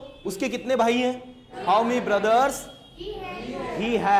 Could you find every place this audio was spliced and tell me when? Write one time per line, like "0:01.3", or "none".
0:01.5